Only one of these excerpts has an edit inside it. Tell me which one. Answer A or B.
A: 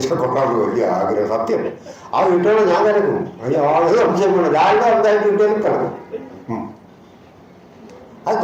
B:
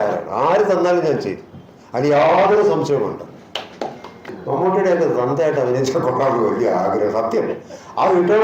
B